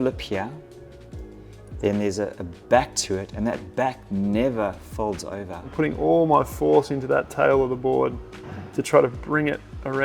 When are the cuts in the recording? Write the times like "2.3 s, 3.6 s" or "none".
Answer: 5.7 s

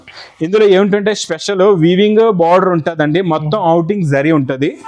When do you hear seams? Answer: none

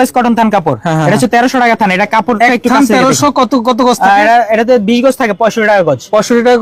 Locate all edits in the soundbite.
none

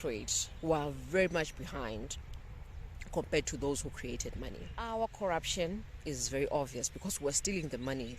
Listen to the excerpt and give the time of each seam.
4.9 s

